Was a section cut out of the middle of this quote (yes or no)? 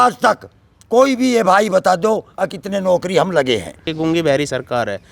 yes